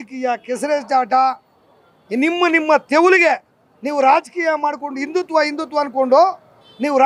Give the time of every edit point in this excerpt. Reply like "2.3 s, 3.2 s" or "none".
none